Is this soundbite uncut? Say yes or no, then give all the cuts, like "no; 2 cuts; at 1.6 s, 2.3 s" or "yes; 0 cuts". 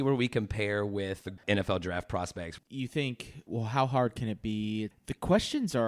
no; 4 cuts; at 1.4 s, 2.6 s, 3.5 s, 4.9 s